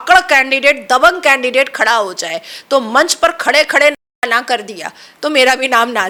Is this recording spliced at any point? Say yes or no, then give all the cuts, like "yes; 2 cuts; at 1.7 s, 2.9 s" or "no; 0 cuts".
no; 0 cuts